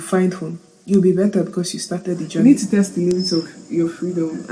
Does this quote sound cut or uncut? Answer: cut